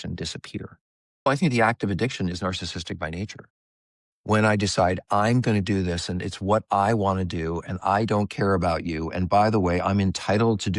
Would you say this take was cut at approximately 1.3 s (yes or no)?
yes